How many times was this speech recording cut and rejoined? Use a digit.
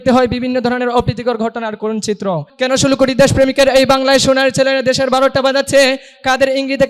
1